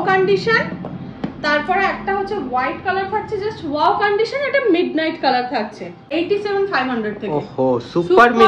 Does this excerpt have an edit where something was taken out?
yes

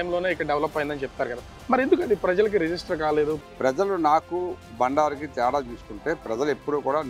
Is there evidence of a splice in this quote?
yes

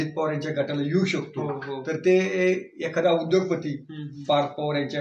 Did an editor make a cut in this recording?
no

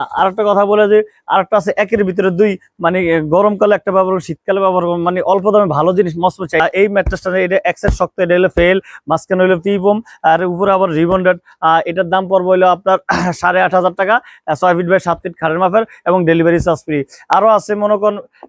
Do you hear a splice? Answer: yes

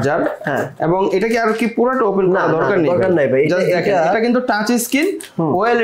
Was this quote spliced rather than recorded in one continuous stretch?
no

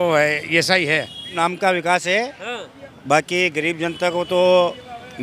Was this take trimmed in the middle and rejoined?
yes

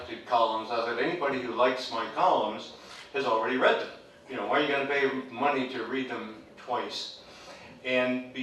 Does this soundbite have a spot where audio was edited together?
yes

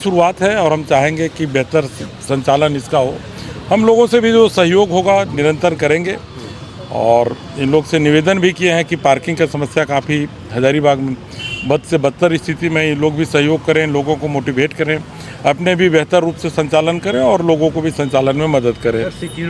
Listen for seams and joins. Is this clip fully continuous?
yes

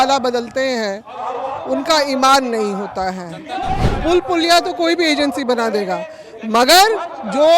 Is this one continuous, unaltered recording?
no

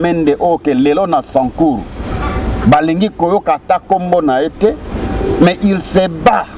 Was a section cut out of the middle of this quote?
no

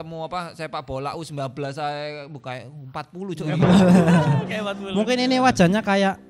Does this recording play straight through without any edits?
yes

